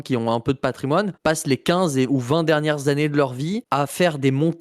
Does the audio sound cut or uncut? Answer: cut